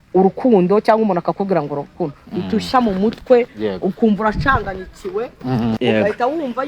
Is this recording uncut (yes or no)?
no